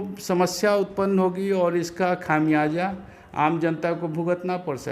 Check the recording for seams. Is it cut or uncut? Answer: uncut